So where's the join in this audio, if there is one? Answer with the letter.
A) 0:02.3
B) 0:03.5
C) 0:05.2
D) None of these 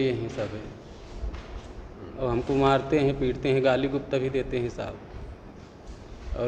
D